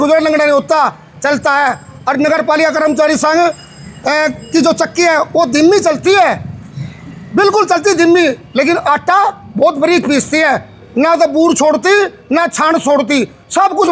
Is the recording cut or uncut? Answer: uncut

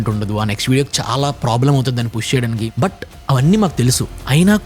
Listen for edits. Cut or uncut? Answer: cut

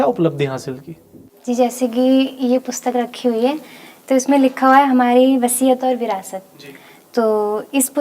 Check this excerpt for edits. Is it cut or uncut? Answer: uncut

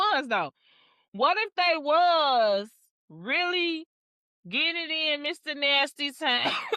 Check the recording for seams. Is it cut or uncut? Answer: uncut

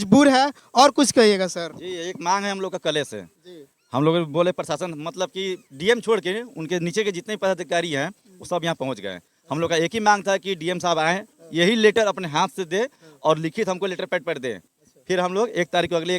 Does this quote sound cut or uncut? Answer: uncut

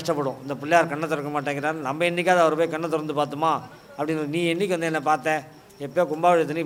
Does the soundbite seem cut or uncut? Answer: uncut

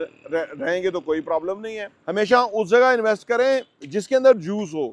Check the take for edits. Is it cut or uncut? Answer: cut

